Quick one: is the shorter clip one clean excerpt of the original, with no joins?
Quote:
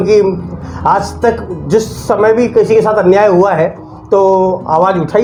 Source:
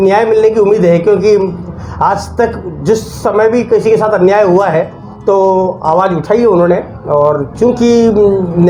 yes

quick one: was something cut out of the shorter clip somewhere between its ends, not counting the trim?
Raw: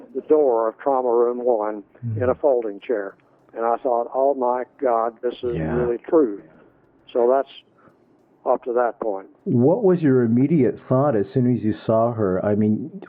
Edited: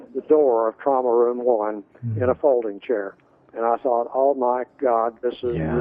no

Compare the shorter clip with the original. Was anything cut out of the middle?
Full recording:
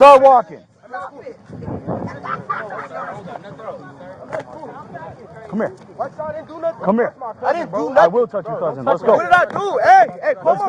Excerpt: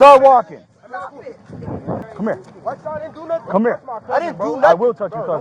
yes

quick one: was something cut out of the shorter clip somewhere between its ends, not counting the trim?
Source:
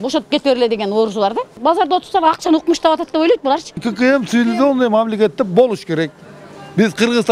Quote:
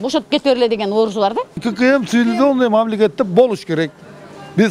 yes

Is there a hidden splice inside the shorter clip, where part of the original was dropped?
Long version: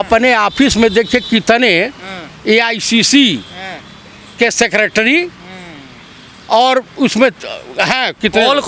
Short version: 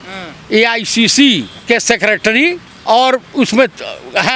yes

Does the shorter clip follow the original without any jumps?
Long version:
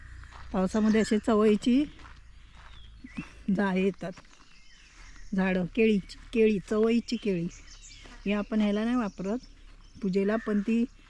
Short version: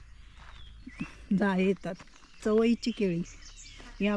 no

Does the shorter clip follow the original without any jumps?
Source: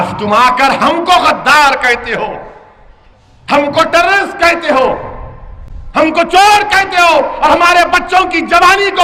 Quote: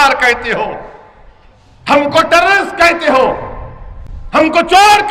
yes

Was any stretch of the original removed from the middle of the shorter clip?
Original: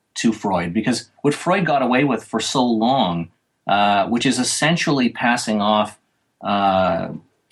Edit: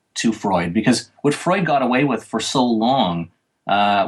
no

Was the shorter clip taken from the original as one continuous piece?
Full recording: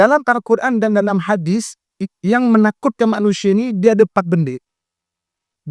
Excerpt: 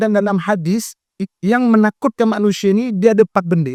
yes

